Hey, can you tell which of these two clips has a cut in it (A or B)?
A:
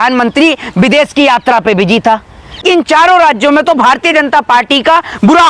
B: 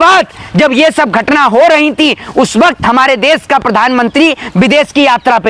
A